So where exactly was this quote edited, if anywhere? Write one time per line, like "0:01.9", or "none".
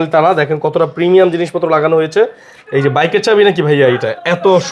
none